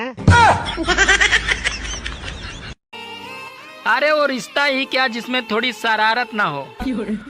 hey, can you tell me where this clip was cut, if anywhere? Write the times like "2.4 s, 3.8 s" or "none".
3.0 s